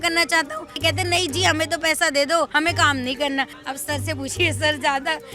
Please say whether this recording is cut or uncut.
cut